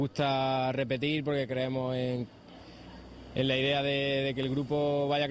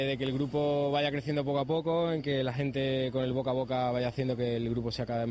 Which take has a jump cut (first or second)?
first